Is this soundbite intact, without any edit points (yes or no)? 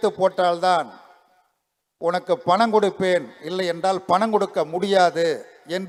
yes